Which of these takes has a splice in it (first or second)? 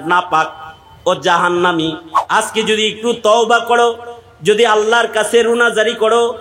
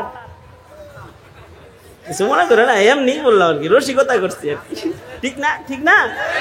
first